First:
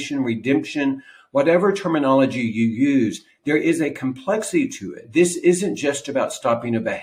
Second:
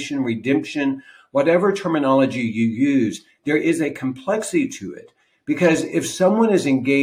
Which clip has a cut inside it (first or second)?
first